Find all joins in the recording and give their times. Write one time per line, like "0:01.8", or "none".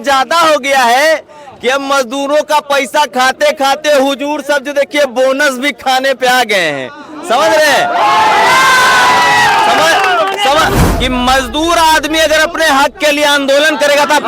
0:10.8

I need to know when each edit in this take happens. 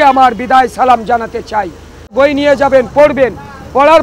0:02.1

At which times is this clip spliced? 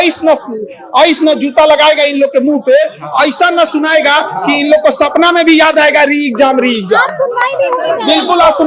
none

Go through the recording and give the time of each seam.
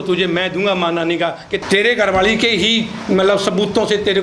0:01.6

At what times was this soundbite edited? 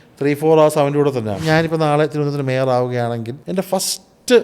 0:01.4
0:03.4

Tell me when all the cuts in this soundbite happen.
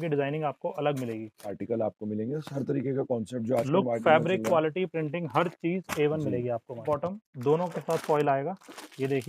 0:01.6
0:06.8

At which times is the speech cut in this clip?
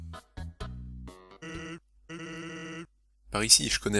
0:01.4

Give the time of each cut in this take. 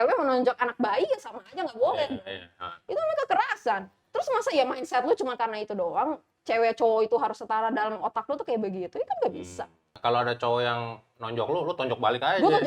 0:09.9

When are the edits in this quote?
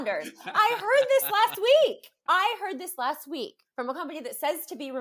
0:02.1
0:03.6

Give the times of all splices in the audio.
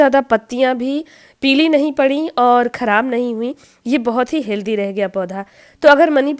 none

